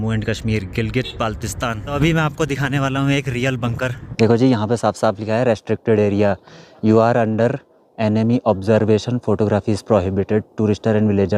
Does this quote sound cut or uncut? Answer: cut